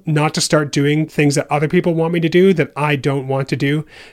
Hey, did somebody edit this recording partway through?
yes; 1 cut; at 1.1 s

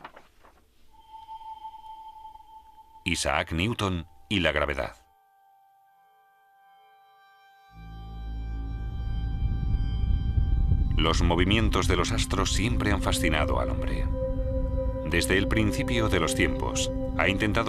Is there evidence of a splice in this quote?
yes; 1 cut; at 5.1 s

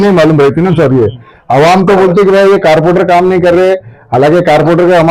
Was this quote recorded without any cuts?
yes; 0 cuts

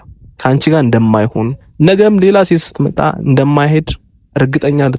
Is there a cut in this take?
no; 0 cuts

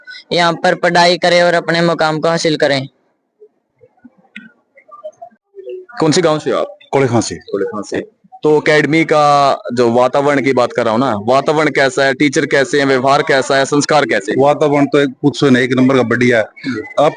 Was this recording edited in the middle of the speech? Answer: no; 0 cuts

